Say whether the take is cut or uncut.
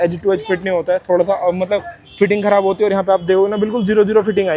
uncut